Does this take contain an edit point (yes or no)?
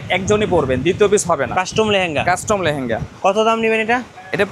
no